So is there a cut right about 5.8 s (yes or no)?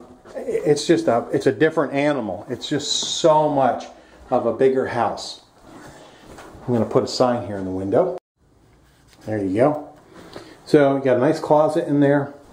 no